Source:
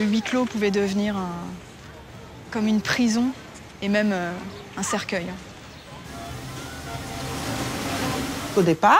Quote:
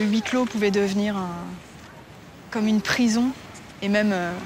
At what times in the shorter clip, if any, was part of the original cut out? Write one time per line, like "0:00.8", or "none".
none